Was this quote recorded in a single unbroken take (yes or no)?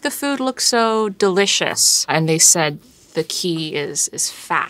yes